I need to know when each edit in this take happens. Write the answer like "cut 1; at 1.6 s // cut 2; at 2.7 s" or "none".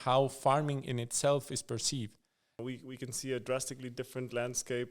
cut 1; at 2.6 s